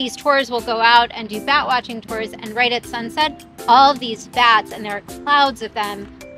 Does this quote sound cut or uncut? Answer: uncut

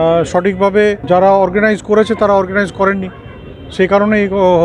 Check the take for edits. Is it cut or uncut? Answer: cut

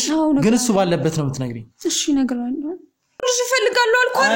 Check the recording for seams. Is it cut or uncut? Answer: cut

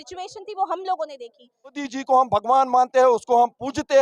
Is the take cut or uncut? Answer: cut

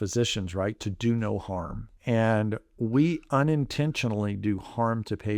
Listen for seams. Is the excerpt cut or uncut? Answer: cut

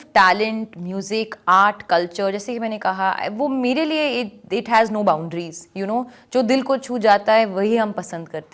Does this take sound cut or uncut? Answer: uncut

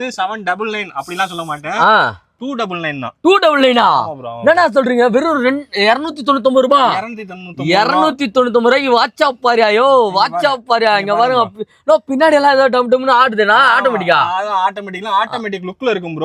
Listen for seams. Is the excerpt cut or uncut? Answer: uncut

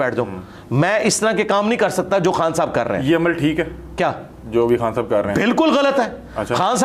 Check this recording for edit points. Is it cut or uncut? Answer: uncut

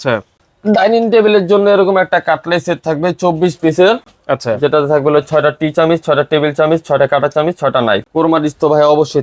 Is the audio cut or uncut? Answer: cut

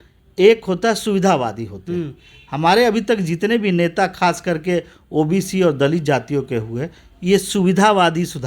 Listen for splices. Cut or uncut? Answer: uncut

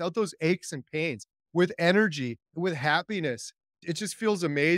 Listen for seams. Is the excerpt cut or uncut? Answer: cut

